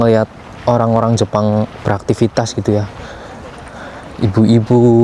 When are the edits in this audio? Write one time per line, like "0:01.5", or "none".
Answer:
none